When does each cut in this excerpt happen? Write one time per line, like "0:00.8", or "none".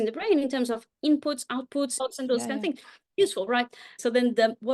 0:02.0
0:03.9